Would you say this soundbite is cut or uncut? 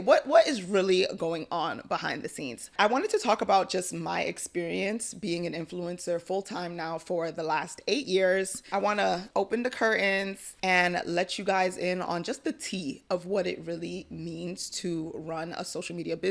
cut